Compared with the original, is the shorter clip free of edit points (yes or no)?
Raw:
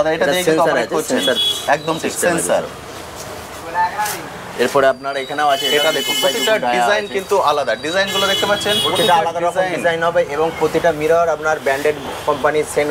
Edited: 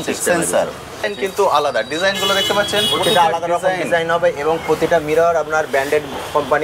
no